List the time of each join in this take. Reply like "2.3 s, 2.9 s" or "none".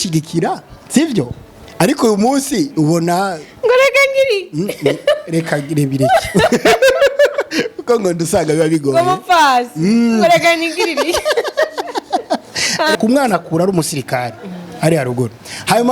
13.0 s